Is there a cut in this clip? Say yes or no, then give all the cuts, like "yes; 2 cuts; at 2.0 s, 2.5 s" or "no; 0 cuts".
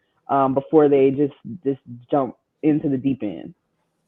no; 0 cuts